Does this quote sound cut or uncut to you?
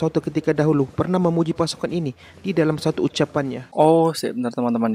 cut